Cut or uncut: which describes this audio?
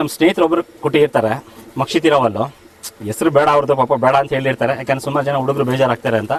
uncut